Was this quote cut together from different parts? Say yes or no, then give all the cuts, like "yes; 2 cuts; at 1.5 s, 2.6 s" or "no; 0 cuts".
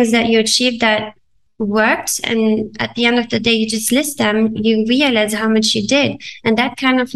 no; 0 cuts